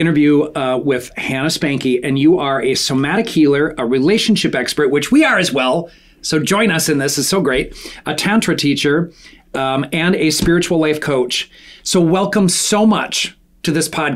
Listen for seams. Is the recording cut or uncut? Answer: uncut